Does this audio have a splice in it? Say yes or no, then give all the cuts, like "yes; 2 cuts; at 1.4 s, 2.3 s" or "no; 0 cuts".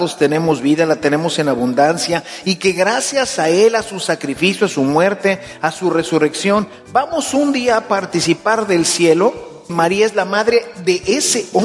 yes; 1 cut; at 9.7 s